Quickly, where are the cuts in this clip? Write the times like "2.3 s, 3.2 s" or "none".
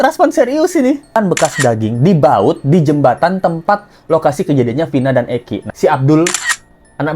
1.2 s, 5.7 s